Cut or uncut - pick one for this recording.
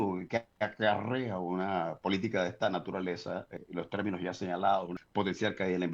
cut